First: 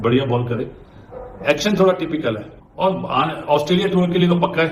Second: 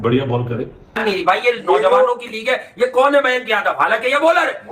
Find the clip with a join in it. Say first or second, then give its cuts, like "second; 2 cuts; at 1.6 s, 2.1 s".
second; 1 cut; at 1.0 s